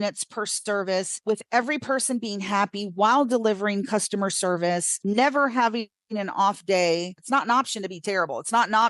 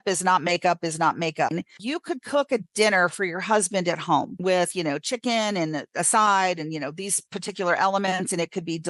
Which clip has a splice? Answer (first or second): second